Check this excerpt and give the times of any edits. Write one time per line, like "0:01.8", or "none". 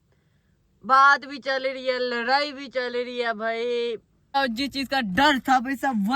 0:04.3